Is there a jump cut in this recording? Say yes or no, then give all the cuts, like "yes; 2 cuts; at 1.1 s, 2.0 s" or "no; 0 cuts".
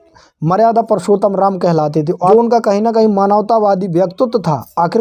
no; 0 cuts